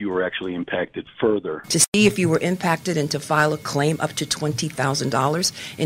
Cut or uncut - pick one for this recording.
cut